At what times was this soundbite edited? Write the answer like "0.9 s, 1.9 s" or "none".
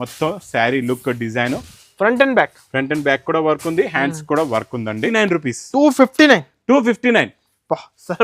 1.8 s, 5.1 s

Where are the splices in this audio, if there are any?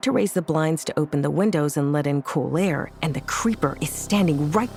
none

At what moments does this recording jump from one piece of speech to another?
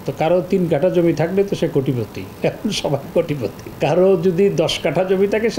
2.2 s, 3.6 s

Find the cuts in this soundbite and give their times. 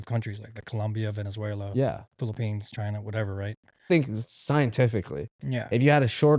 3.8 s

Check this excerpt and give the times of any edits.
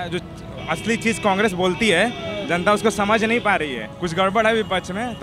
3.9 s

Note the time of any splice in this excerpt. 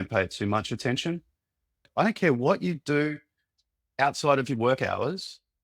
1.8 s

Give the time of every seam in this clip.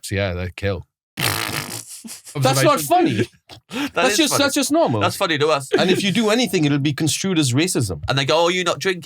1.0 s, 2.4 s, 5.6 s, 8.0 s

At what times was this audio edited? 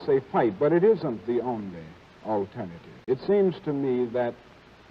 2.9 s

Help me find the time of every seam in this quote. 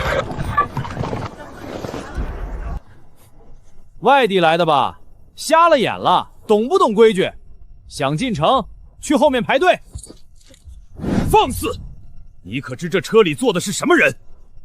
1.3 s

